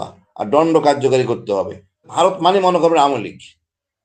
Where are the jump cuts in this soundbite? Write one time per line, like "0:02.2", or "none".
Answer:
0:02.1